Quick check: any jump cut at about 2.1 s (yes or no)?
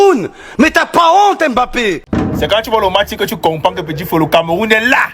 yes